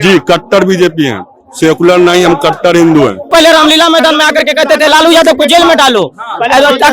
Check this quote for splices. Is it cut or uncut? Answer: cut